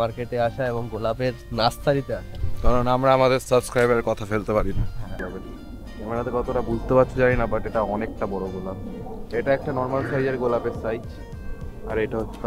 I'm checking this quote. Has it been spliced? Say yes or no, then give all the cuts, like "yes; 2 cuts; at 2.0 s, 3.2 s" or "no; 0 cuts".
yes; 1 cut; at 5.2 s